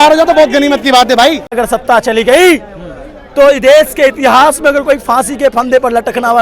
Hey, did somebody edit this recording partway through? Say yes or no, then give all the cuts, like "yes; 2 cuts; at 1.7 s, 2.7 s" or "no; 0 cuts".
yes; 1 cut; at 1.6 s